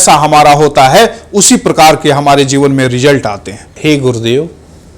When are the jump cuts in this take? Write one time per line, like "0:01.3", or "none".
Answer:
0:03.7

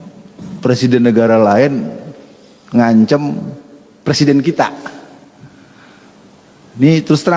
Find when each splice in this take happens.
none

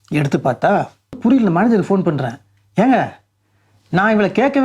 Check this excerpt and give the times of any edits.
0:01.2

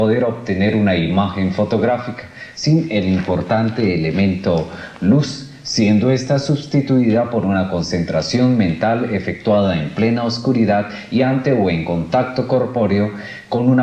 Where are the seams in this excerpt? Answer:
0:02.6

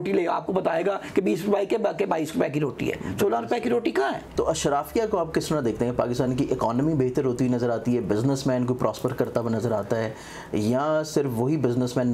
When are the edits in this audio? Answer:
0:04.2

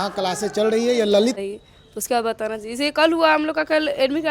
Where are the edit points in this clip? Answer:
0:01.3

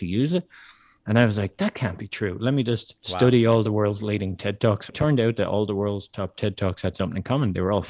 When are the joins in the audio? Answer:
0:03.0
0:04.9

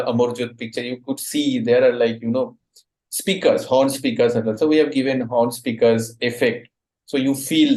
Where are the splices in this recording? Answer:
none

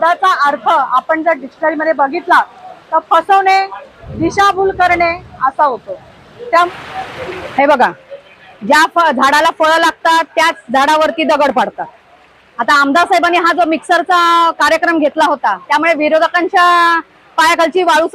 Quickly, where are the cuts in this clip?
0:06.7

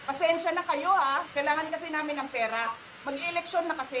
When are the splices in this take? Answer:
0:01.3

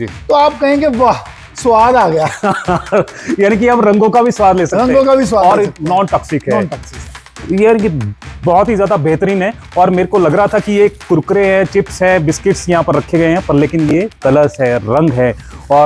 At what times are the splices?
none

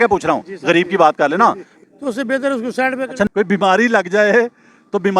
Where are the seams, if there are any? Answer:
0:01.7
0:03.3

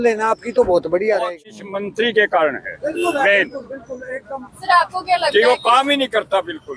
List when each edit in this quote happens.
0:01.5

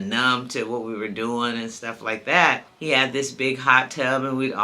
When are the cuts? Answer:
0:02.7

